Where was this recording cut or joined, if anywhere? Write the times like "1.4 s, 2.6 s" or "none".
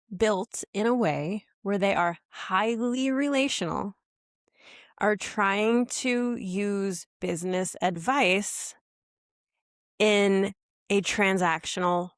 none